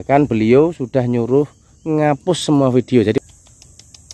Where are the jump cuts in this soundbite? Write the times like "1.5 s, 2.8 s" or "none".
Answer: 3.2 s